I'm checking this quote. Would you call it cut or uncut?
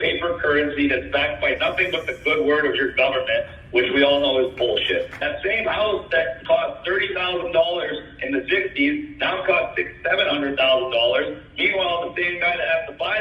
cut